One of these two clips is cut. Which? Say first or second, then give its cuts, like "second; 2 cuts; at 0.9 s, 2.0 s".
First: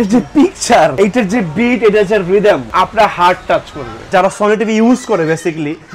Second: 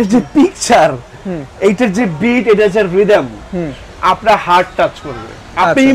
first; 3 cuts; at 0.9 s, 2.7 s, 4.1 s